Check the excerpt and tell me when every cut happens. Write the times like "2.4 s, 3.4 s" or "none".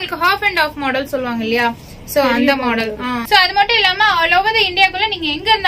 3.2 s